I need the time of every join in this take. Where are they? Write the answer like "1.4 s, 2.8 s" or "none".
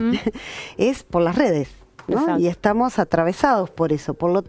none